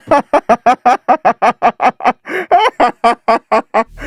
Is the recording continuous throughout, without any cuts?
yes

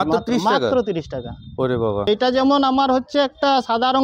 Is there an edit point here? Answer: yes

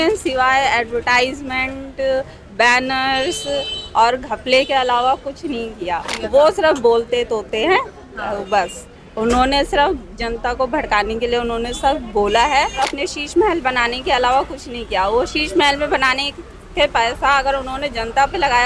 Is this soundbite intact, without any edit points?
no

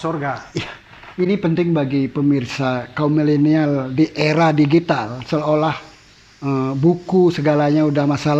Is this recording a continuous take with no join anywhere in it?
yes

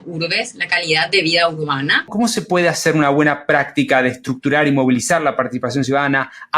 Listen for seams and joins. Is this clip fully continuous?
no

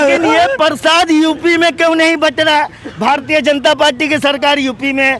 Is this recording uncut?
yes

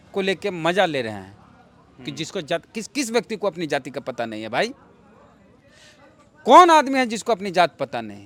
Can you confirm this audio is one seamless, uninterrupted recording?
yes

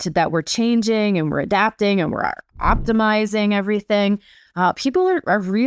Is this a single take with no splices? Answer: yes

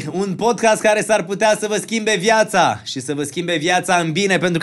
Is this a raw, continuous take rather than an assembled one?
yes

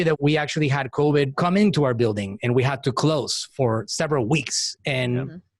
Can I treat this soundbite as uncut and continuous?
no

